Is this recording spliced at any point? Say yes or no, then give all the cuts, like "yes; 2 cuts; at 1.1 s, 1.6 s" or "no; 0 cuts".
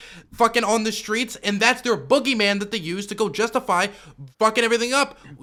no; 0 cuts